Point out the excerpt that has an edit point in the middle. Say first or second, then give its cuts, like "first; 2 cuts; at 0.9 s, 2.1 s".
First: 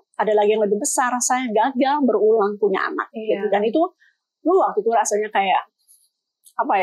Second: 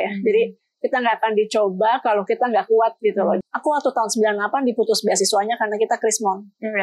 second; 1 cut; at 3.4 s